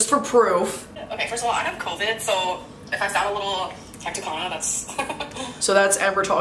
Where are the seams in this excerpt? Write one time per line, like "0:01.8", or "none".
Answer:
0:00.9